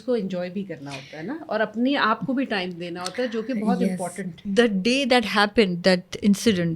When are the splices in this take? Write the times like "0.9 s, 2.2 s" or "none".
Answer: 4.4 s